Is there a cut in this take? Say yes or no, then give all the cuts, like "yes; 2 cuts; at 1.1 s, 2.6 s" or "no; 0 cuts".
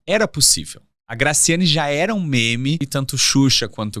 yes; 1 cut; at 2.9 s